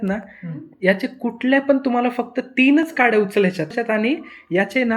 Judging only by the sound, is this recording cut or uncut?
cut